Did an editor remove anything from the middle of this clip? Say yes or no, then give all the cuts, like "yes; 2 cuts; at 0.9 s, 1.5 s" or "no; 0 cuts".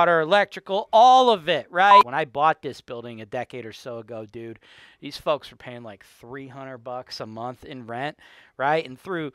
yes; 1 cut; at 2.1 s